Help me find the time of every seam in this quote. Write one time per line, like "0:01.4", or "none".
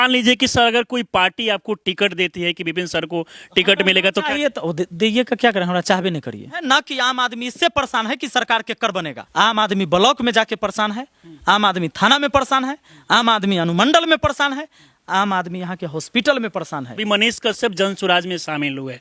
0:06.6
0:09.2
0:16.9